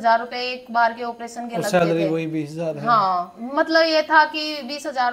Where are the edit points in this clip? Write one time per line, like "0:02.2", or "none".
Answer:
none